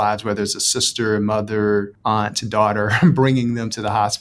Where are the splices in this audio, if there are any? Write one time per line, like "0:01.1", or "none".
0:01.9